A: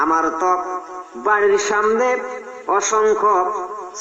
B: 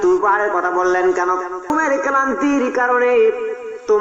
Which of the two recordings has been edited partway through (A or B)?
B